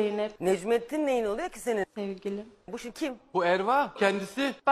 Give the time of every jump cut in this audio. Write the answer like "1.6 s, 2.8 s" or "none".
2.9 s